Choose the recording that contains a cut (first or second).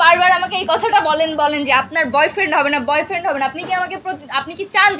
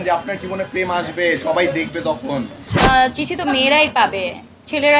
second